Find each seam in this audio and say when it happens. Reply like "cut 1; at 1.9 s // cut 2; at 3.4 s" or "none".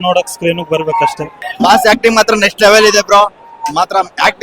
cut 1; at 1.3 s